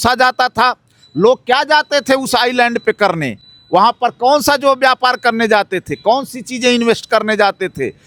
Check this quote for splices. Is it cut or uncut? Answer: uncut